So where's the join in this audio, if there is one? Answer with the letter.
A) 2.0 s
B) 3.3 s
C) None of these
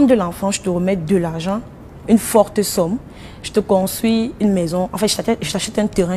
C